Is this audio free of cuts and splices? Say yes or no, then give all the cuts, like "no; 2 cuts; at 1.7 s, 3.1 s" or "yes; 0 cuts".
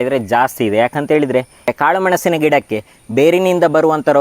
no; 1 cut; at 1.7 s